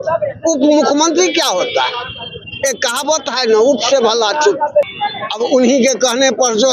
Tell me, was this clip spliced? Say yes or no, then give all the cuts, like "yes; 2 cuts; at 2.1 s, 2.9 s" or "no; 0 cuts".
yes; 1 cut; at 4.8 s